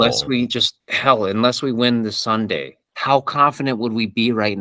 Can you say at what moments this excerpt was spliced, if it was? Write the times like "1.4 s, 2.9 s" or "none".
2.8 s